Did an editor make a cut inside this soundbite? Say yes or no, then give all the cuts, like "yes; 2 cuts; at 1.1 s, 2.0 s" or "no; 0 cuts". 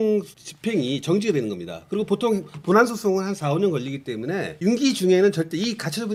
no; 0 cuts